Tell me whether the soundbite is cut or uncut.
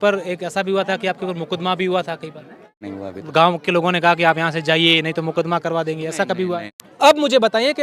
cut